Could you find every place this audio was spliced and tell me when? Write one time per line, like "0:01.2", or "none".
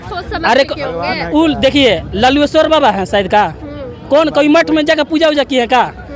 none